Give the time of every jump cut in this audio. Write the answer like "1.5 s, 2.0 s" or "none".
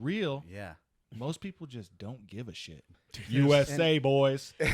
1.0 s, 2.9 s